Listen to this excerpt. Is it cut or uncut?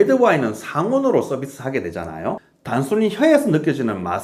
cut